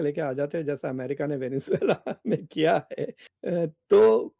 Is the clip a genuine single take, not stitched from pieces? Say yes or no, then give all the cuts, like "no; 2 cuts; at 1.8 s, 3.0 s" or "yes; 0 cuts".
yes; 0 cuts